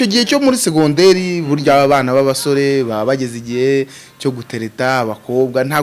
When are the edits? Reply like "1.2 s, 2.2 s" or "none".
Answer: none